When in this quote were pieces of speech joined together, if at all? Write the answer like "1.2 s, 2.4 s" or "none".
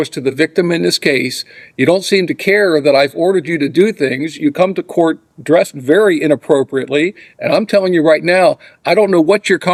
none